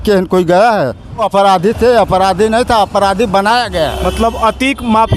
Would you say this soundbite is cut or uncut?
cut